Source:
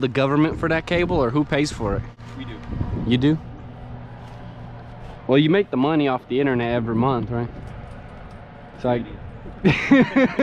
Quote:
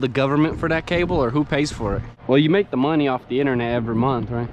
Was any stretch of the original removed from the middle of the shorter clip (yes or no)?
yes